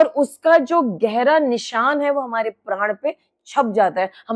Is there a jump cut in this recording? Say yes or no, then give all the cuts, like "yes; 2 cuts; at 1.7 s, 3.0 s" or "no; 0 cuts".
no; 0 cuts